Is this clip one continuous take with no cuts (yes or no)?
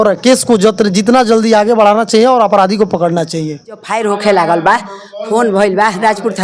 no